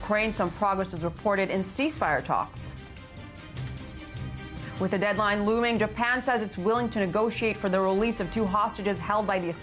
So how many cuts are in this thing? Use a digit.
1